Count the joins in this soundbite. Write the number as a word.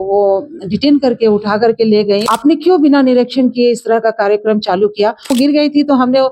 two